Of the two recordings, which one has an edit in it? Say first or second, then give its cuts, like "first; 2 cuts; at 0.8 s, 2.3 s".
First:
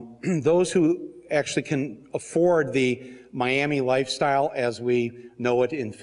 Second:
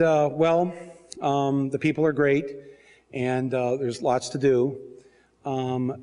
second; 1 cut; at 4.0 s